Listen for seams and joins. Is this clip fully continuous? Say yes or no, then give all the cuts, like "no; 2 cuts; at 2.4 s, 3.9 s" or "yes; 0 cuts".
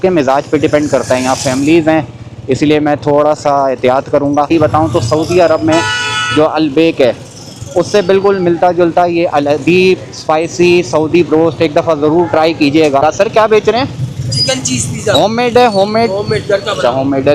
no; 2 cuts; at 4.5 s, 13.0 s